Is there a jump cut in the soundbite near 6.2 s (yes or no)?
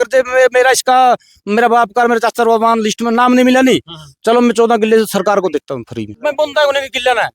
yes